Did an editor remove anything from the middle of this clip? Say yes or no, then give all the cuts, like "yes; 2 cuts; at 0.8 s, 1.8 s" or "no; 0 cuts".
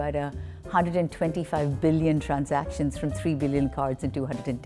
no; 0 cuts